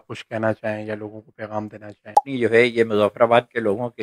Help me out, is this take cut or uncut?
cut